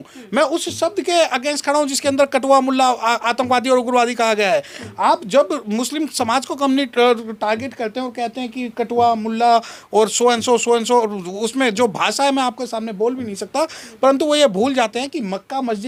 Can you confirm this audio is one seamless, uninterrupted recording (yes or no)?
yes